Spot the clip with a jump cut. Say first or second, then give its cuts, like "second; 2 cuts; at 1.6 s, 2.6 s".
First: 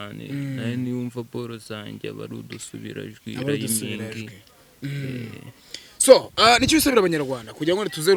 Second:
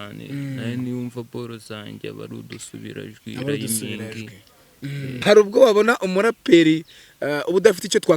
second; 1 cut; at 5.1 s